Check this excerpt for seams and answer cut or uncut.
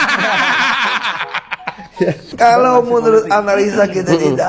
cut